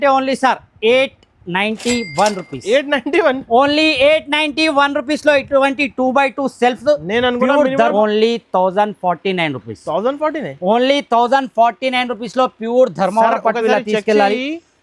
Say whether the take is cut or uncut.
cut